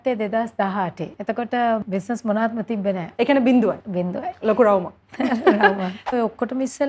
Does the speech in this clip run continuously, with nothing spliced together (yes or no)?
no